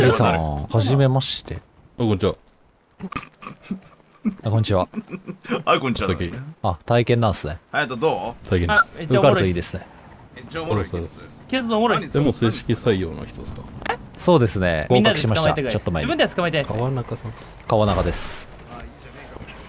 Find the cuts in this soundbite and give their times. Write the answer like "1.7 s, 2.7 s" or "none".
none